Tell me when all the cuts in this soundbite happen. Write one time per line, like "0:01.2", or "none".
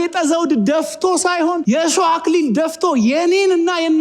0:01.6